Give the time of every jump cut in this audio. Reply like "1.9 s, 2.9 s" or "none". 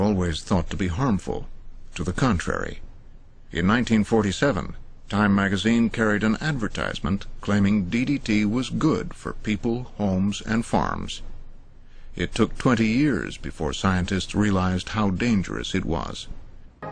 none